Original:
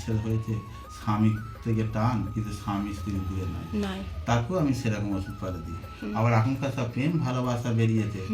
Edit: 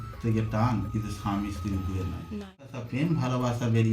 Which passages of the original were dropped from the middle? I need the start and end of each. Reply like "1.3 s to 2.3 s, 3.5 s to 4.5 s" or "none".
4.2 s to 6.8 s